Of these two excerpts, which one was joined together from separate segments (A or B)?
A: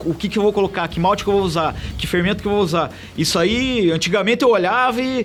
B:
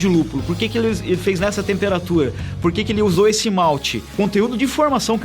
B